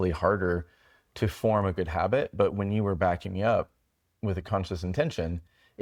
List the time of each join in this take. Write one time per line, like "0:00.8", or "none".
none